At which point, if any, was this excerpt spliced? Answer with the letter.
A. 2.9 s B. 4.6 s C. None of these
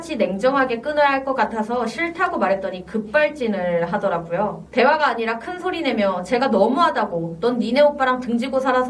B